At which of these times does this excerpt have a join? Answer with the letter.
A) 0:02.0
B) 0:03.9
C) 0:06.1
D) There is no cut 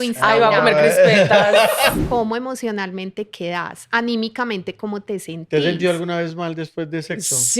A